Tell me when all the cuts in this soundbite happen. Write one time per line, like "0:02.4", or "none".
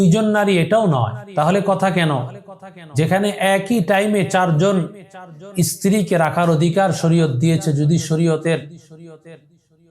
0:01.2